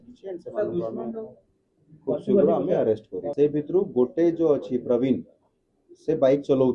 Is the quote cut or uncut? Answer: cut